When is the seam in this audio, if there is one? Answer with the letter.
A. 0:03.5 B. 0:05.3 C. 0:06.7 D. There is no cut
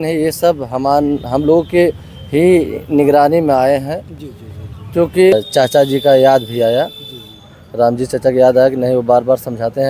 B